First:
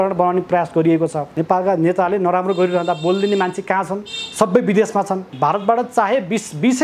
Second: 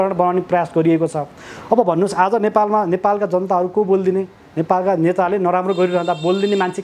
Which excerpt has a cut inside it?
first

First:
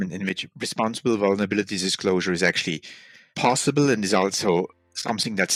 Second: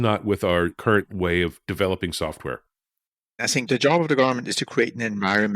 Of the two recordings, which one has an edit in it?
second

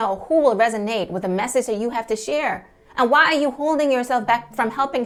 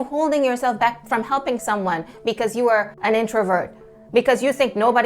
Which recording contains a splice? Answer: second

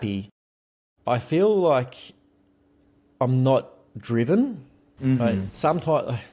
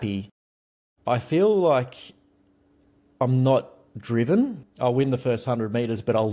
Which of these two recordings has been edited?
second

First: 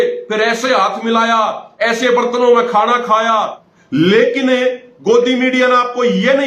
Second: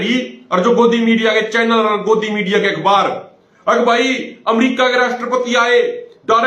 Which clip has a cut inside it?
first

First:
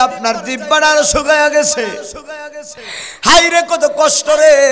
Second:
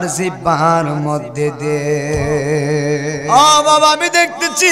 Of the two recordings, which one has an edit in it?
second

